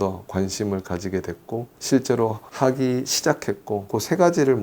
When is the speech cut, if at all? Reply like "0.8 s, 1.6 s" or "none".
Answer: 2.4 s, 3.9 s